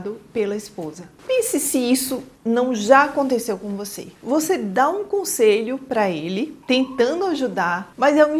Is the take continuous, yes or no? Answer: yes